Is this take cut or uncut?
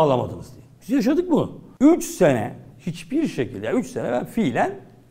cut